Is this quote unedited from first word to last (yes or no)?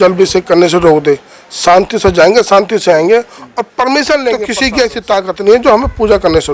no